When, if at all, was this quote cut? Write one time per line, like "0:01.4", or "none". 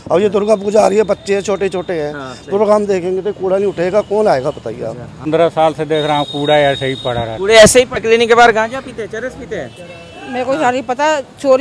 0:05.3
0:08.0